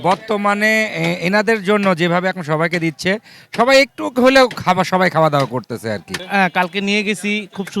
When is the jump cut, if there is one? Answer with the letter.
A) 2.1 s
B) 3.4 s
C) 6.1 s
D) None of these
C